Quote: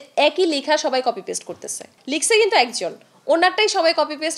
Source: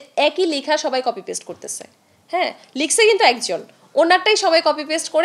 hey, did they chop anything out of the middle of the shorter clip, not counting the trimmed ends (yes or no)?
yes